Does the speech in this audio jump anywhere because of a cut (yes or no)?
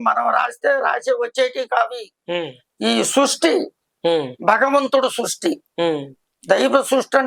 no